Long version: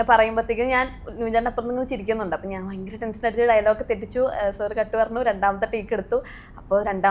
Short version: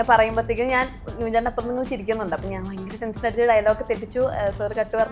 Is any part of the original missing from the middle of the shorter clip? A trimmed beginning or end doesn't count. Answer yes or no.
no